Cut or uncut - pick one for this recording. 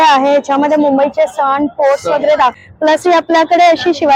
cut